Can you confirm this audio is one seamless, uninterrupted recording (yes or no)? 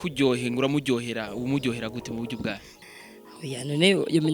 no